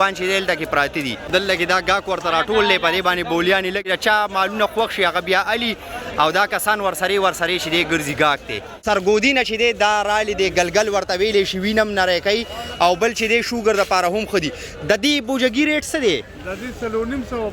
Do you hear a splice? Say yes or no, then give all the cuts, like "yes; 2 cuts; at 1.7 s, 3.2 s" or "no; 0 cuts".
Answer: yes; 3 cuts; at 1.3 s, 3.9 s, 8.7 s